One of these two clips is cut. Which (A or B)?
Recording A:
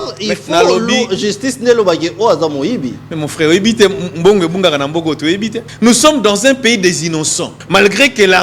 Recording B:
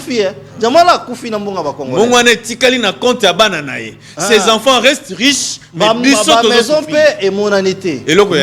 A